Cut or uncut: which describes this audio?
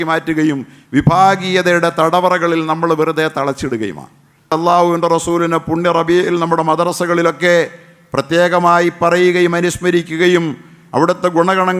cut